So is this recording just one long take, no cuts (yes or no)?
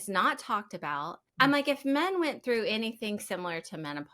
no